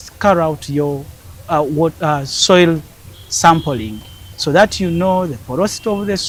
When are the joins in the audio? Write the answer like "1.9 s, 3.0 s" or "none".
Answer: none